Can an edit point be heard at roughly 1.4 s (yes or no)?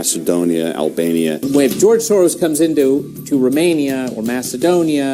yes